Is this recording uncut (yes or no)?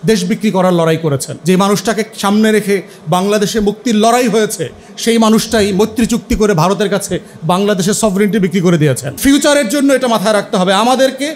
no